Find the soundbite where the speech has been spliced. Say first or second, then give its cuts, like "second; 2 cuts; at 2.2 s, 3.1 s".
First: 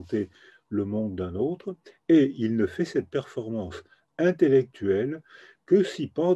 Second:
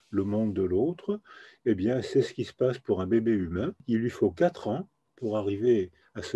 second; 1 cut; at 3.8 s